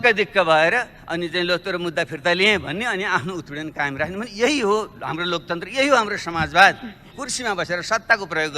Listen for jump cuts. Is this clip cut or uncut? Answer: cut